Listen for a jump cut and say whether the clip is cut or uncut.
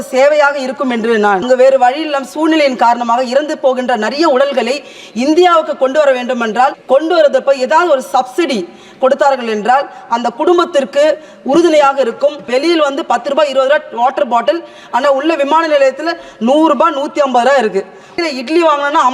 cut